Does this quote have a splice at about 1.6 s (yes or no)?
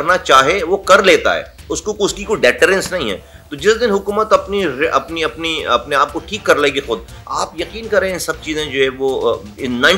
no